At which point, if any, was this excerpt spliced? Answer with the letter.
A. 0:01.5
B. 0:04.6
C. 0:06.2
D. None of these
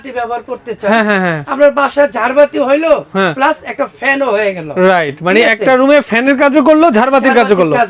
D